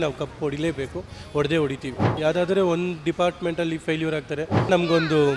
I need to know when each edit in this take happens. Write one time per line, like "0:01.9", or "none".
0:02.2
0:04.7